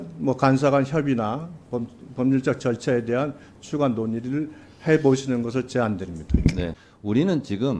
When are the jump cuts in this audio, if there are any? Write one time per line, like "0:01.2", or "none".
0:06.8

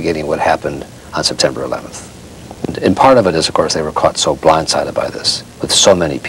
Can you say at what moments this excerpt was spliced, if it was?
0:02.7

